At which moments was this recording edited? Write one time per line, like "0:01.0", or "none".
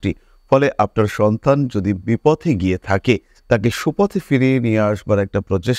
none

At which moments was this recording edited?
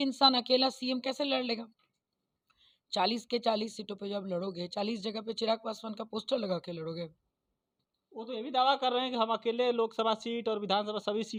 none

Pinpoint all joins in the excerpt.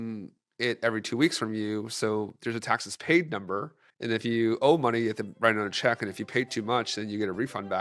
none

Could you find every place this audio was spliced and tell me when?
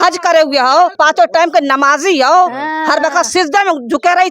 0:00.9

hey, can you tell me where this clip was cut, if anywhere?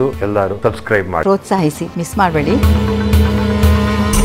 0:01.2
0:02.6

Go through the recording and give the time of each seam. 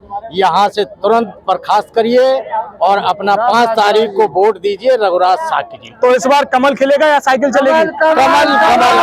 none

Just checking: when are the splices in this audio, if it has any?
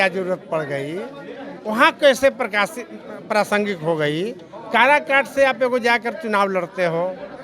none

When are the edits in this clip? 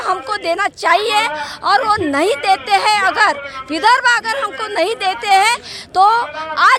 none

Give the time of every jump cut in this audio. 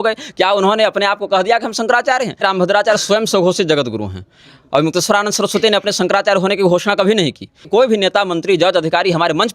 0:02.4
0:07.6

